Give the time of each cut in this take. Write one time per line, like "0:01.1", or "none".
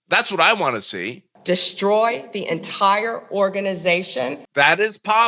0:01.3
0:04.4